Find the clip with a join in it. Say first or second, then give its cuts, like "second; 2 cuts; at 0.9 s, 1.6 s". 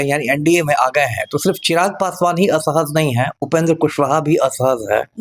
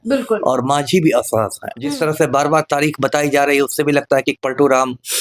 second; 1 cut; at 1.9 s